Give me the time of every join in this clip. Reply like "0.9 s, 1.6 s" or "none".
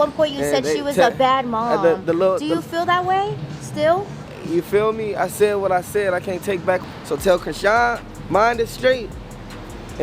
6.8 s